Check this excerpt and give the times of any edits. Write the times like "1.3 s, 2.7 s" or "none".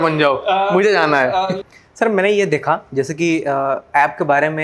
1.5 s